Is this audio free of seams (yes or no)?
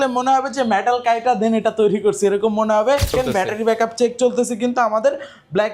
no